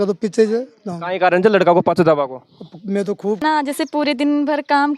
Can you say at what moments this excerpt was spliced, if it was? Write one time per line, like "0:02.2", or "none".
0:03.4